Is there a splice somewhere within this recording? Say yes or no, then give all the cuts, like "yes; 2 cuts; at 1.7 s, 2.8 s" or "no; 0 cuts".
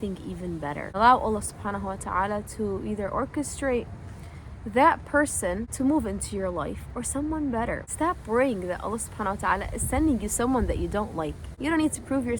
yes; 4 cuts; at 1.0 s, 5.7 s, 7.9 s, 11.4 s